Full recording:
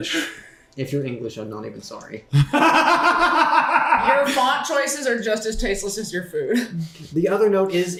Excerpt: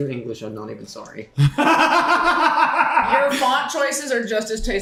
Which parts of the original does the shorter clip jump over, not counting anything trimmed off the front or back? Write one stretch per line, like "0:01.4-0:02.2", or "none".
none